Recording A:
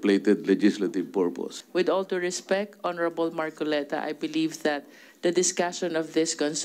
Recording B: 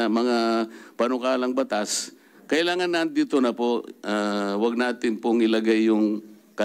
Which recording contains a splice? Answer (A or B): A